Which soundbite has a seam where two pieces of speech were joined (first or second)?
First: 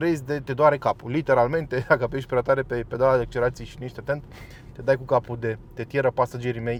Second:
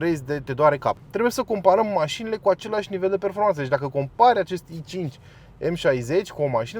second